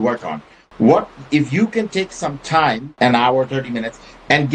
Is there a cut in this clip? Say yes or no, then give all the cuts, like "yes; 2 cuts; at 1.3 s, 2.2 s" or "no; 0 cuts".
yes; 1 cut; at 2.9 s